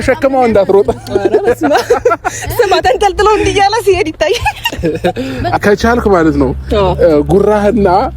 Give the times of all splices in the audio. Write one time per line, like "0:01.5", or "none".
0:05.6